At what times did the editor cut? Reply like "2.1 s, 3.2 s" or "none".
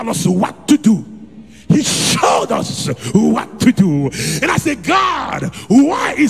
none